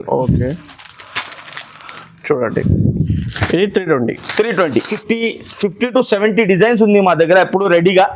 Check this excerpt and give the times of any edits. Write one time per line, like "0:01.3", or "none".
0:05.0